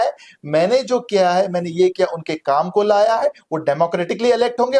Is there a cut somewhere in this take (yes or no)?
no